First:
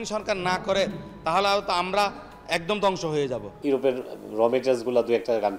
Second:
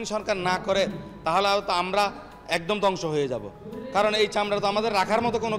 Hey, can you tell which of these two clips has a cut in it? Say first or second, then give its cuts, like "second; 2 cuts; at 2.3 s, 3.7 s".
first; 1 cut; at 3.5 s